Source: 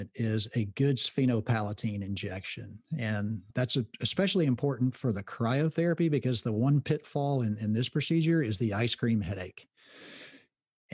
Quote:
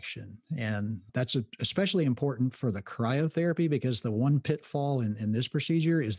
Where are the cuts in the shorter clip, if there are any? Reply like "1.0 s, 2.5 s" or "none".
none